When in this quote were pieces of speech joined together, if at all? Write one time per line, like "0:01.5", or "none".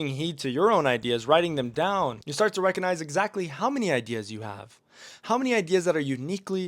0:02.2